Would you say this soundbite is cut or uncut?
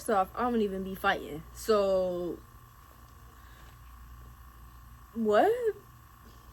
uncut